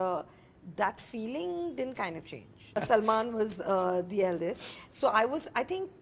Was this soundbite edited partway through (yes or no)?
yes